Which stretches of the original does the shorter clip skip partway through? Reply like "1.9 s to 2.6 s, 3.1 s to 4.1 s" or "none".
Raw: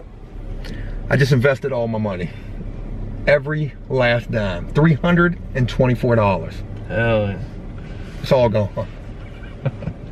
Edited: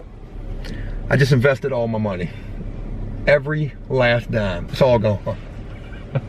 4.6 s to 8.1 s